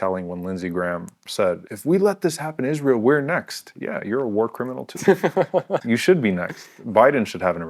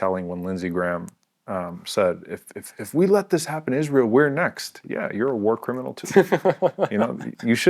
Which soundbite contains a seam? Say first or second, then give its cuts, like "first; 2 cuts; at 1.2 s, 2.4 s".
first; 2 cuts; at 1.3 s, 5.8 s